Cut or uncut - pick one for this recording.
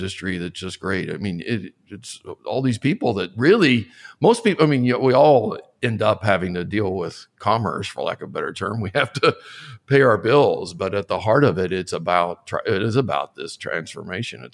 uncut